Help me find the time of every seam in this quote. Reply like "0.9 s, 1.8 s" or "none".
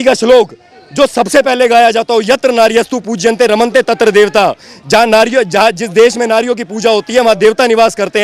none